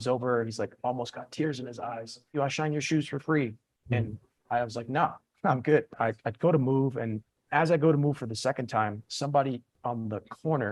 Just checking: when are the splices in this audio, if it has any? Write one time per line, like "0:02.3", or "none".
0:02.3
0:05.9